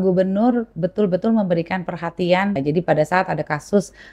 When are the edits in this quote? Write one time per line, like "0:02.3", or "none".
0:02.6